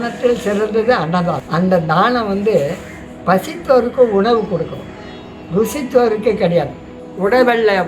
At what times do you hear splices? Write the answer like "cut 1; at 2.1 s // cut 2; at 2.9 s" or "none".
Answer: cut 1; at 1.4 s // cut 2; at 7.0 s